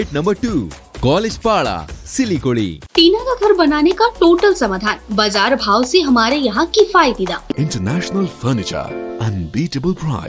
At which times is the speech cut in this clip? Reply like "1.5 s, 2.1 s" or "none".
2.8 s, 7.5 s